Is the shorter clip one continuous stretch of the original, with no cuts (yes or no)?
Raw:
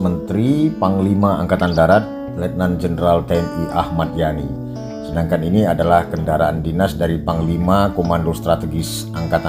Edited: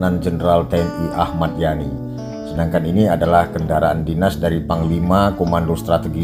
yes